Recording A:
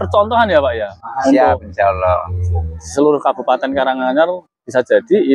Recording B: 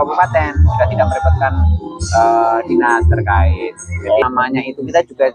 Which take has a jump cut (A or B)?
B